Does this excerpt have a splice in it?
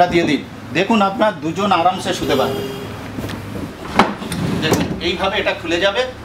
yes; 1 cut; at 3.7 s

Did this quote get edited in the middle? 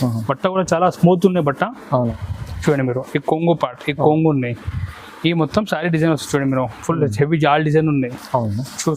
yes; 1 cut; at 2.2 s

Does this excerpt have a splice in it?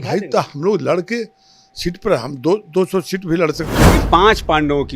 yes; 1 cut; at 3.9 s

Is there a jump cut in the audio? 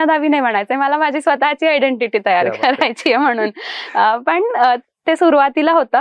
no; 0 cuts

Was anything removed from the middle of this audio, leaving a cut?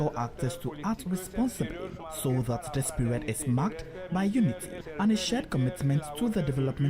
yes; 2 cuts; at 2.0 s, 4.8 s

